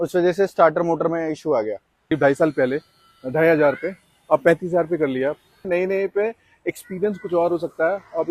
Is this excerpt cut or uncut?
cut